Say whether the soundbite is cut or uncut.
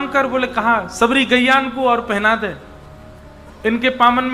uncut